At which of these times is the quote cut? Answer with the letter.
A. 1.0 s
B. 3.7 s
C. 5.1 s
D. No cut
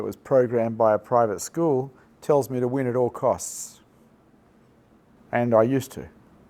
C